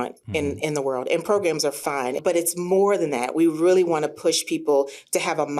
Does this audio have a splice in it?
yes; 1 cut; at 2.2 s

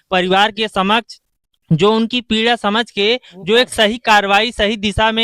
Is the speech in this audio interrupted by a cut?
no; 0 cuts

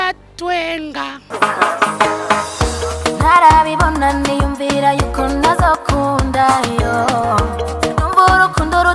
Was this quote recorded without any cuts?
no; 1 cut; at 1.2 s

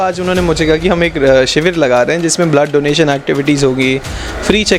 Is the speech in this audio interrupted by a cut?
no; 0 cuts

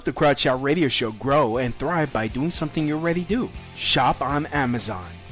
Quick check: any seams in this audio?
yes; 1 cut; at 1.0 s

